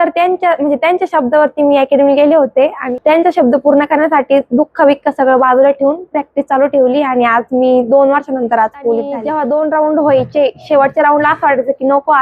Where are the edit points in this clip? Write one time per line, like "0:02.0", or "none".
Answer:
0:02.8
0:09.2